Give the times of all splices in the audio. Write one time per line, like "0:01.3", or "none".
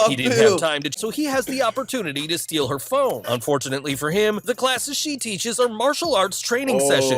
0:01.0